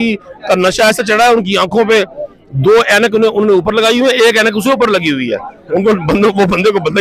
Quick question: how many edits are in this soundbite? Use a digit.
0